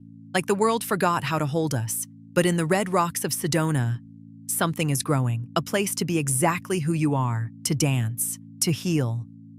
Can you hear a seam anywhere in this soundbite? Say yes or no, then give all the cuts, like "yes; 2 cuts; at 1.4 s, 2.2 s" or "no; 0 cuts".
no; 0 cuts